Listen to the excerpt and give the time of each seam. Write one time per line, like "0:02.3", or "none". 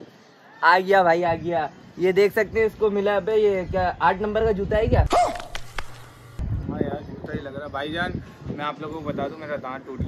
none